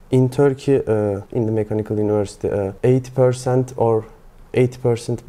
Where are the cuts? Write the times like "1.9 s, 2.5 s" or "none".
1.2 s, 2.7 s

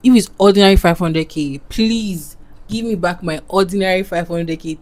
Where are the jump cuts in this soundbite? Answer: none

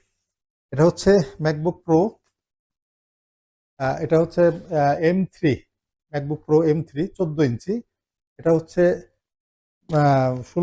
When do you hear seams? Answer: none

